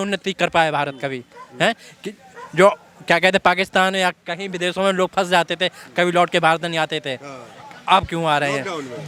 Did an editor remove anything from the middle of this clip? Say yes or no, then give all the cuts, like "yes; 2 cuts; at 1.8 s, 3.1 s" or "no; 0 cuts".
no; 0 cuts